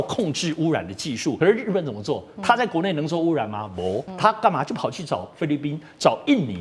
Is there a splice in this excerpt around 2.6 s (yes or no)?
no